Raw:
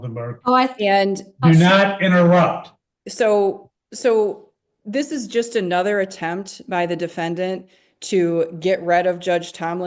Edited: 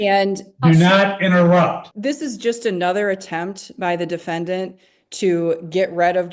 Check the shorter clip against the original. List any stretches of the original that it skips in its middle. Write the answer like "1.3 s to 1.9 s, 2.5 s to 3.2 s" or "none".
2.7 s to 4.8 s